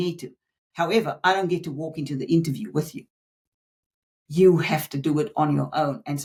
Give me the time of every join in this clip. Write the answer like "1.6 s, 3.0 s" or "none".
none